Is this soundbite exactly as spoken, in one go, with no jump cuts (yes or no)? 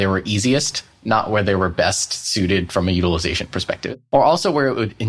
no